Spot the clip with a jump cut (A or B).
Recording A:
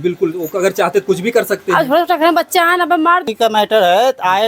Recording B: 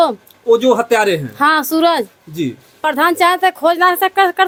A